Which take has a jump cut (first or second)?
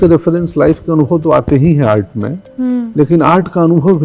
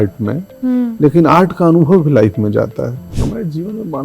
second